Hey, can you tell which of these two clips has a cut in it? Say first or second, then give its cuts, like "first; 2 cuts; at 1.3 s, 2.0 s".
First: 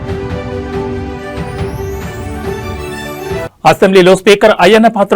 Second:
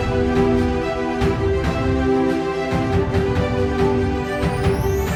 first; 1 cut; at 2.8 s